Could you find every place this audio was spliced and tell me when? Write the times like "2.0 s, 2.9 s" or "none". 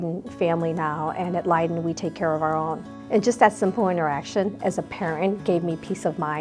none